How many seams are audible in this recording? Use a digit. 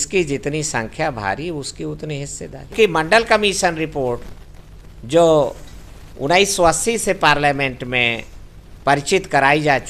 1